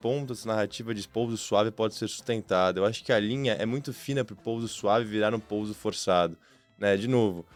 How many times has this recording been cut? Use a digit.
0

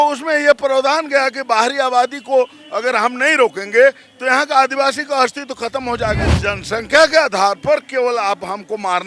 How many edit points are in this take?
1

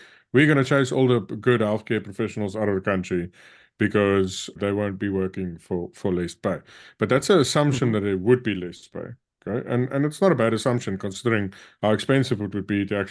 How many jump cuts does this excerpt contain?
1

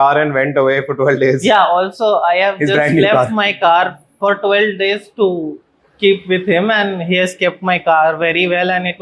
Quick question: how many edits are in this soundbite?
0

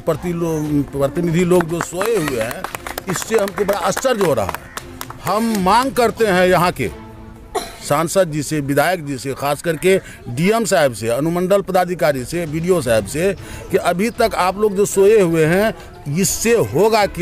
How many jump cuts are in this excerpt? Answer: 0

